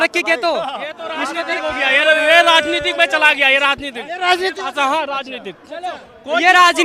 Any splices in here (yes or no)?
no